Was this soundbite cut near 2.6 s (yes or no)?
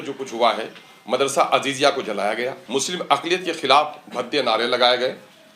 yes